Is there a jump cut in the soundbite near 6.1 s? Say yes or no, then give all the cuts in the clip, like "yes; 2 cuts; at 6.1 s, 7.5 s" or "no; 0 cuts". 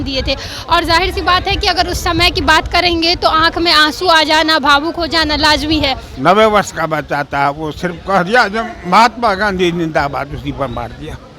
yes; 1 cut; at 6.1 s